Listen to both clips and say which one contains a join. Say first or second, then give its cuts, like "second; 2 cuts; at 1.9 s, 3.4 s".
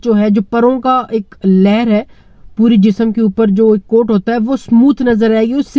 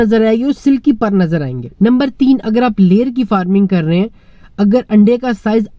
second; 1 cut; at 1.6 s